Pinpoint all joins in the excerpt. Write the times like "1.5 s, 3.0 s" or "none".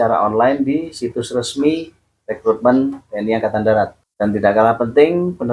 4.0 s